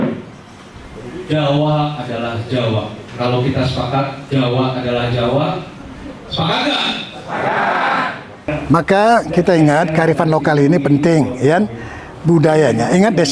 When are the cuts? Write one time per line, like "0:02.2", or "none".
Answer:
0:03.0
0:08.6